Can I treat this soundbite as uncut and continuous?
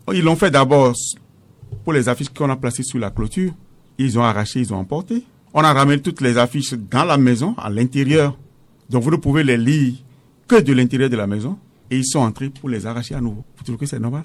yes; 0 cuts

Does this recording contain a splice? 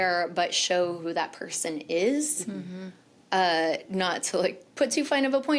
no; 0 cuts

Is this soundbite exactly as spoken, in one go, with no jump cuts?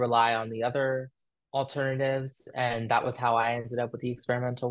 yes; 0 cuts

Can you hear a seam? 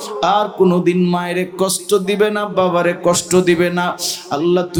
no; 0 cuts

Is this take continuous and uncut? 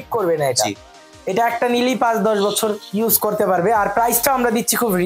yes; 0 cuts

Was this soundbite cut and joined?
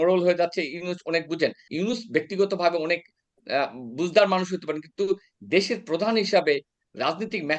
yes; 1 cut; at 1.7 s

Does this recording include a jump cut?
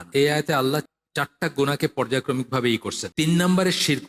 yes; 2 cuts; at 1.0 s, 3.0 s

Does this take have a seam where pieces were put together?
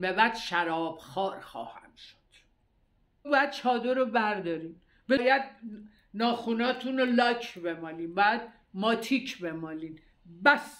yes; 2 cuts; at 3.3 s, 5.2 s

